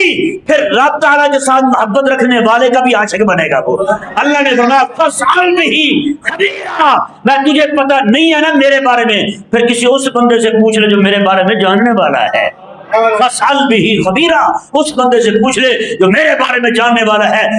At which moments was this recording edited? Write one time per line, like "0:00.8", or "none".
none